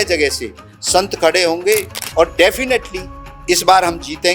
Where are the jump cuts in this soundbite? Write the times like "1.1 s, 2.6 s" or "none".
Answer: 2.0 s